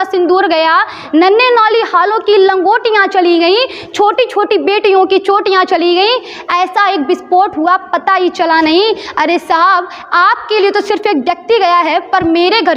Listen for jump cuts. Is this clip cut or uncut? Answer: uncut